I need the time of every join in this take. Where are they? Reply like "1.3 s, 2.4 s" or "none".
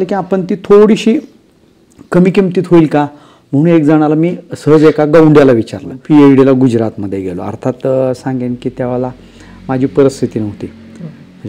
5.9 s